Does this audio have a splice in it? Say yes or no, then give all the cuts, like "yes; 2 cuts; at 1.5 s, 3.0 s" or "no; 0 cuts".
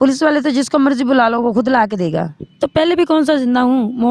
yes; 1 cut; at 2.4 s